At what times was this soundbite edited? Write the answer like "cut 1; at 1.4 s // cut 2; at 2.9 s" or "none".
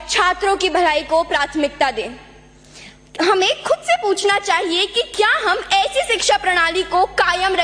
none